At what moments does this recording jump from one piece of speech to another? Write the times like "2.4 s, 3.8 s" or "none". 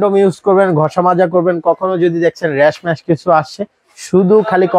none